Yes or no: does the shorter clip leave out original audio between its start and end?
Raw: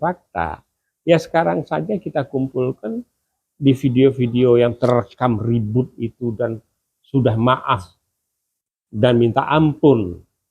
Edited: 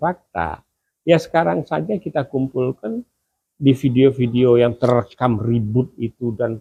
no